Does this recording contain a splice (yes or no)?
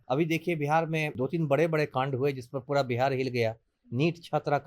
yes